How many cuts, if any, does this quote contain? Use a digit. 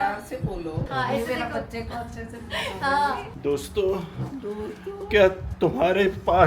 2